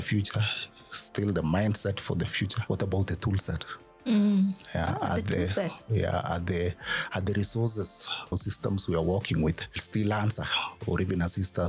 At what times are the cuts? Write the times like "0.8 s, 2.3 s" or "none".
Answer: 2.6 s, 8.3 s